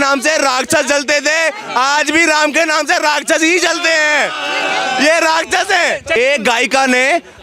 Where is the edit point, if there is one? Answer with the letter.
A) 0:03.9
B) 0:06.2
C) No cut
B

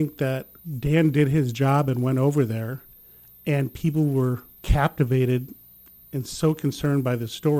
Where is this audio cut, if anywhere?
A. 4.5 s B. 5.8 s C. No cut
A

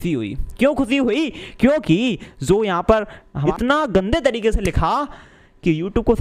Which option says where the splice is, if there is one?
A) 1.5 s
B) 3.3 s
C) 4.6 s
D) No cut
B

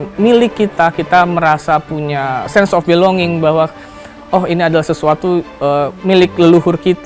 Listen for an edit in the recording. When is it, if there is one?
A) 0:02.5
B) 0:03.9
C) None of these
A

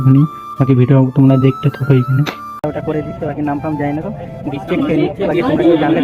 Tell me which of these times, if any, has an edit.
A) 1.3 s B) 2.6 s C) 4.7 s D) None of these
B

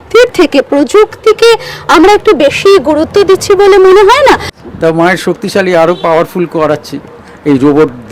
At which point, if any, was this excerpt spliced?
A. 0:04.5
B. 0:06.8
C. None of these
A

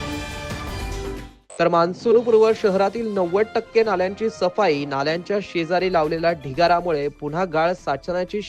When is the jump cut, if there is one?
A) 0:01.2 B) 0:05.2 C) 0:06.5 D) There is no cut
A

